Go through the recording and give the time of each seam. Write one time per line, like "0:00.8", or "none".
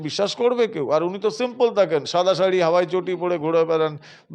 none